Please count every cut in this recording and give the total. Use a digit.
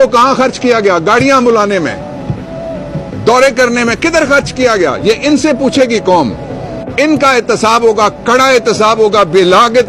0